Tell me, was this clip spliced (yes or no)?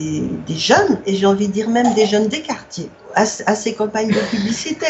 yes